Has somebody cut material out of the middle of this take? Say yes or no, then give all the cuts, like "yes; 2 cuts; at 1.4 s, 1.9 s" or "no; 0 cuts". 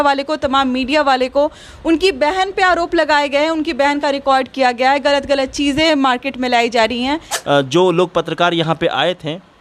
yes; 1 cut; at 7.3 s